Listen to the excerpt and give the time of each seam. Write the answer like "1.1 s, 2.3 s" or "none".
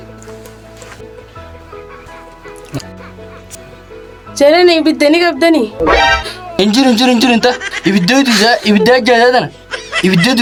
none